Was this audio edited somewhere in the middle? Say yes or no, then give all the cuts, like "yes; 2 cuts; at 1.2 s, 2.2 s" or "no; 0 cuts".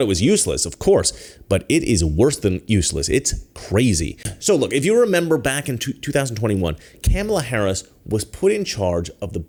no; 0 cuts